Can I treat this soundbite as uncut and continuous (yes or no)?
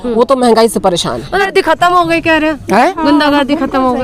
no